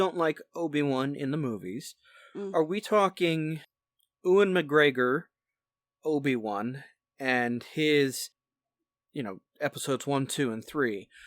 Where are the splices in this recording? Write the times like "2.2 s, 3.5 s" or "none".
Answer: 3.7 s